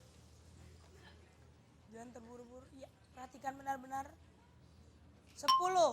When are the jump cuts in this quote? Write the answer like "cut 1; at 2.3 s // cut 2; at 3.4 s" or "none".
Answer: none